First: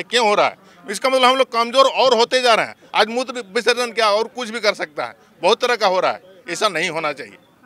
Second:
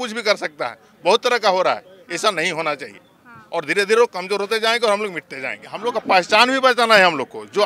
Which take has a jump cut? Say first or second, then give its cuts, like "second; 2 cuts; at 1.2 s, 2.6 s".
second; 1 cut; at 5.6 s